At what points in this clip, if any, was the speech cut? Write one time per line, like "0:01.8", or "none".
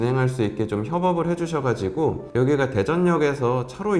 0:02.2